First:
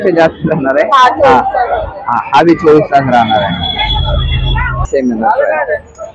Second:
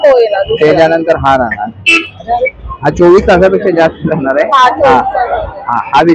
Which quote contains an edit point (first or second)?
first